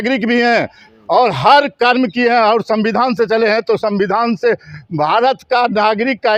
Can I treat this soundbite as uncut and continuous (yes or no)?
yes